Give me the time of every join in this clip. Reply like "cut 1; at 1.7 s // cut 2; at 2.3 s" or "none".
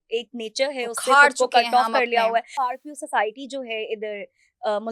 cut 1; at 2.5 s